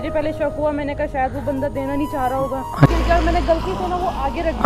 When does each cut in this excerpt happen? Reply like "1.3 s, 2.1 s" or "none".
2.9 s